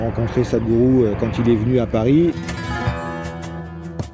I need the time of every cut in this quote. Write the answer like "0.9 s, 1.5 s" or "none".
2.4 s